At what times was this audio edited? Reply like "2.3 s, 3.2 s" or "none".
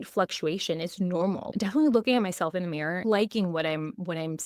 1.5 s, 3.0 s